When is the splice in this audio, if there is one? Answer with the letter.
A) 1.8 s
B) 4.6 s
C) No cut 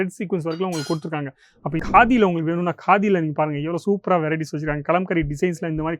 A